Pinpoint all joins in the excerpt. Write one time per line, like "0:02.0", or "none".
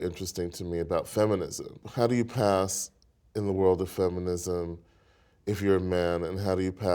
0:01.8